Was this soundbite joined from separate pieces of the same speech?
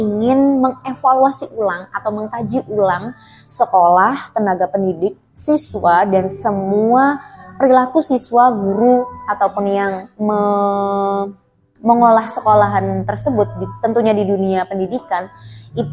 no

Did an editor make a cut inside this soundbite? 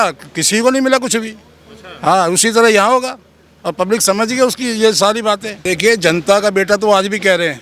yes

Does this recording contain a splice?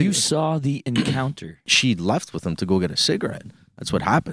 yes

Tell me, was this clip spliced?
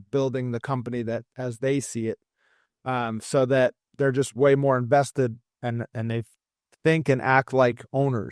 no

